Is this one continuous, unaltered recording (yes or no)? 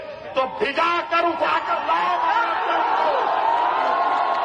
yes